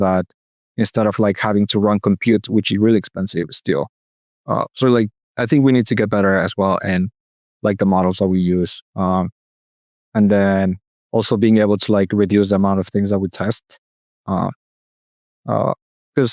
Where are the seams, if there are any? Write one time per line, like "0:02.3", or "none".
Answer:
none